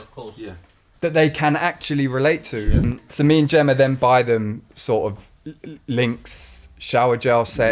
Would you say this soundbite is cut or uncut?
cut